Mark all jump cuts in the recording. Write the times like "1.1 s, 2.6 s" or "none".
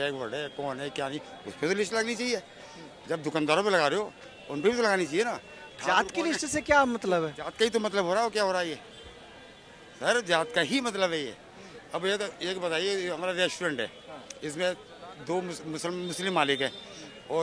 none